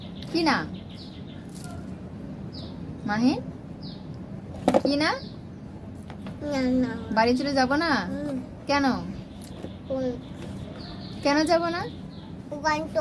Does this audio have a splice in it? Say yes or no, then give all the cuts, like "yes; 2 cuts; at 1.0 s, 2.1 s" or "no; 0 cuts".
no; 0 cuts